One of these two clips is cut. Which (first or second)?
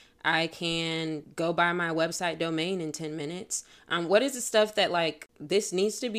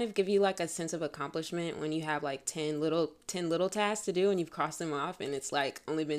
first